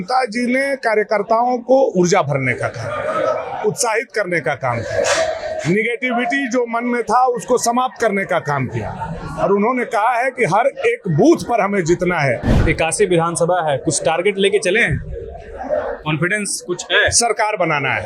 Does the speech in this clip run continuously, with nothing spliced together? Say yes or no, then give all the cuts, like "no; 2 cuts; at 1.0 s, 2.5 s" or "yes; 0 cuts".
no; 1 cut; at 12.5 s